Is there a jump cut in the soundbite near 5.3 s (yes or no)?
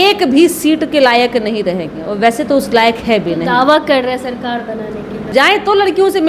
yes